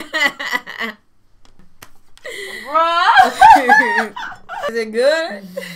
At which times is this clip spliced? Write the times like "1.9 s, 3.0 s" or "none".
1.7 s, 4.7 s